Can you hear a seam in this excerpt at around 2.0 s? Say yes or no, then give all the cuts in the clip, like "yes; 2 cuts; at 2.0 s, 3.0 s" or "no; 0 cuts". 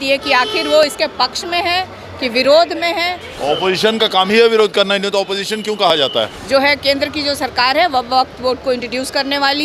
no; 2 cuts; at 3.3 s, 6.4 s